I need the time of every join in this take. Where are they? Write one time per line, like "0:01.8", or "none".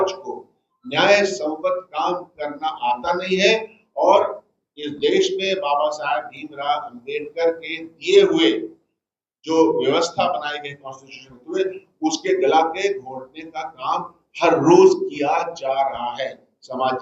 none